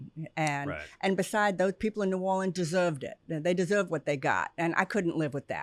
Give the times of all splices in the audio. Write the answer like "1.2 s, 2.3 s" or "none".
none